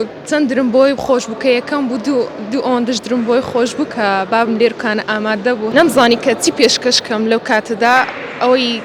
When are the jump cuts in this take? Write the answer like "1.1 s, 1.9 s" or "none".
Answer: 5.7 s